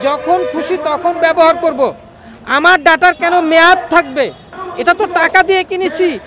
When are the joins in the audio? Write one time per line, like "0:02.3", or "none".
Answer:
0:04.6